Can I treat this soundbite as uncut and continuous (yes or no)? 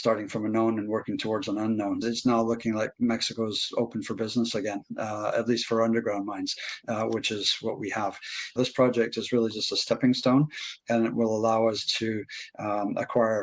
no